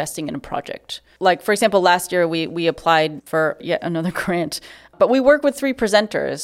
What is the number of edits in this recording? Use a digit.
2